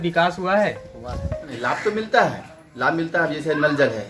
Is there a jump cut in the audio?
yes; 1 cut; at 1.5 s

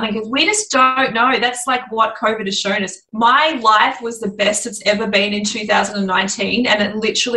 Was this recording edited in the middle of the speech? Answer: yes; 1 cut; at 3.0 s

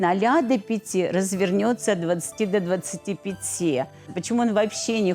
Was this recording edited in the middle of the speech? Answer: yes; 1 cut; at 4.1 s

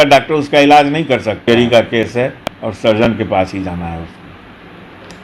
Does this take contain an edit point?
yes; 2 cuts; at 1.4 s, 2.7 s

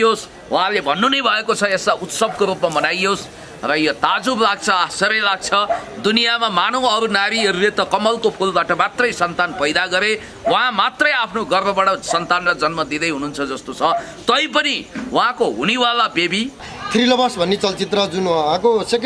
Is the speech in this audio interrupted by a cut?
yes; 1 cut; at 16.7 s

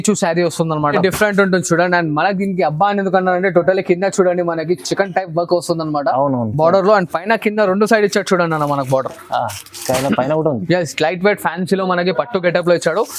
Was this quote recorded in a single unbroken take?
no; 1 cut; at 0.9 s

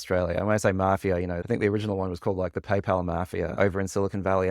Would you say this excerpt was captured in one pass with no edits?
no; 1 cut; at 1.4 s

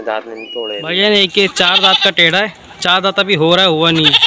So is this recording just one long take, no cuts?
no; 1 cut; at 0.9 s

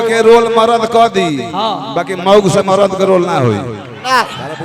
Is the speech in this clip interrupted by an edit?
no; 0 cuts

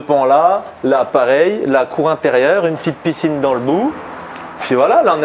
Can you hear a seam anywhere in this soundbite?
no; 0 cuts

